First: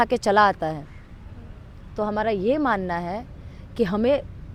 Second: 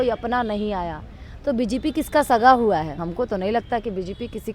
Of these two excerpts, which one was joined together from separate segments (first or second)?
second